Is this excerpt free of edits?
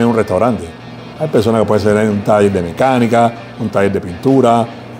yes; 0 cuts

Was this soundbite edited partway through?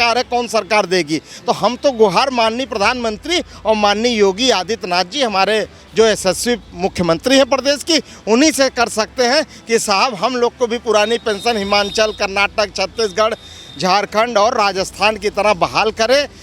no; 0 cuts

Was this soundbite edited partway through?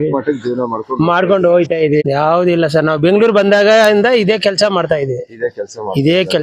yes; 1 cut; at 2.0 s

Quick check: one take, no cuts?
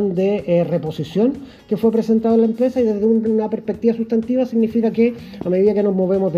yes; 0 cuts

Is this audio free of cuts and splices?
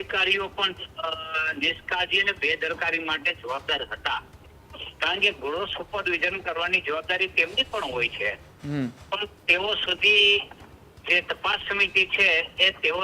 yes; 0 cuts

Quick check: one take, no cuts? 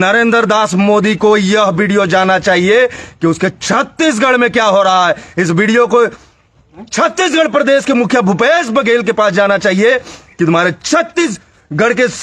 yes; 0 cuts

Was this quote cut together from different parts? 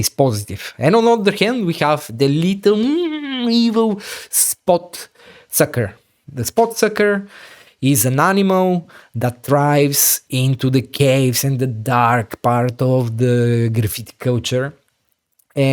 no; 0 cuts

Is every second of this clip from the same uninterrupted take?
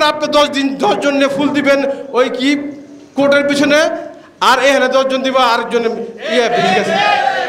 yes; 0 cuts

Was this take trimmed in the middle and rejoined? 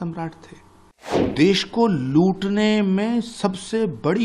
yes; 1 cut; at 1.3 s

